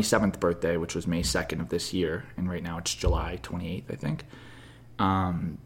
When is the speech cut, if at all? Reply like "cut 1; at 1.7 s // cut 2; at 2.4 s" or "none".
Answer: none